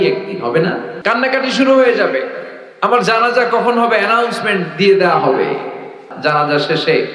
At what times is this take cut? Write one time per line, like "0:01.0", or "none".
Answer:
0:00.9
0:06.0